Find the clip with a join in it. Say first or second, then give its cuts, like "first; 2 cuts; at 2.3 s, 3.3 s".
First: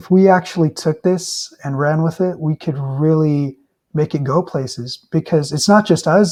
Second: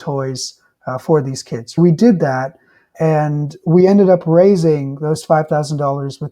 second; 2 cuts; at 1.8 s, 2.9 s